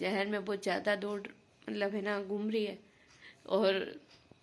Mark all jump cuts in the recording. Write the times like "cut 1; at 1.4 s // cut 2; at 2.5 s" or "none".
none